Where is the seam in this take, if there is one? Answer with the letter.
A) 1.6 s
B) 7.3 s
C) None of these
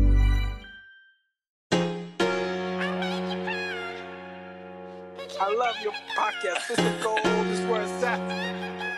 A